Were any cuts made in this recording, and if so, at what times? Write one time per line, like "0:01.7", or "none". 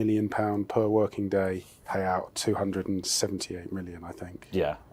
0:01.7